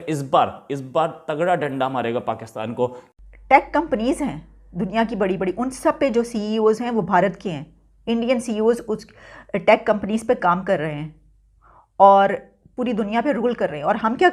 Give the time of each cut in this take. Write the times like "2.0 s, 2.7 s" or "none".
3.2 s